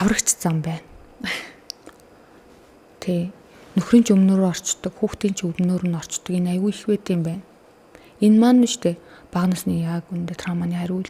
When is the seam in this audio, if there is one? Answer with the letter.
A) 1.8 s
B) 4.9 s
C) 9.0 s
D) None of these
D